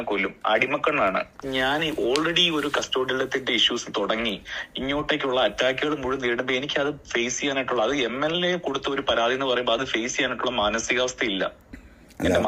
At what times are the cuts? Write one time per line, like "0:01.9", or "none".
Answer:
0:01.4